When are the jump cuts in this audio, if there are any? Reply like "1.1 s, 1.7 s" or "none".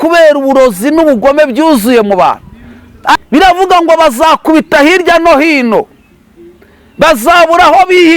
3.2 s

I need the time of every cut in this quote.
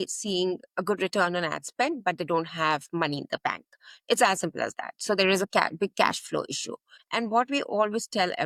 none

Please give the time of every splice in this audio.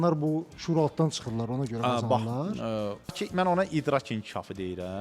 3.1 s

